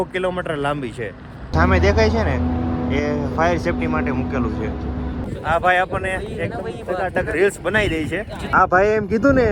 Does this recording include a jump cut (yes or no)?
yes